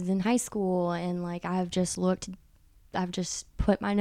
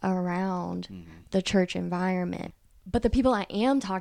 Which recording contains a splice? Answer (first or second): second